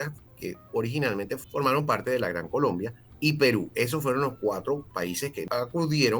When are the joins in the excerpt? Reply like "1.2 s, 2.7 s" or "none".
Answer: 1.4 s, 5.4 s